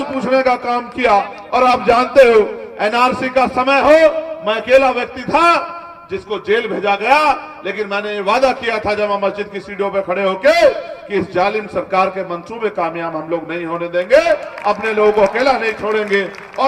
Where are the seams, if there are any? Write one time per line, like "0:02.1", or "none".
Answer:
none